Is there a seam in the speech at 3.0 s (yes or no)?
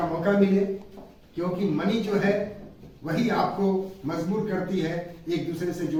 no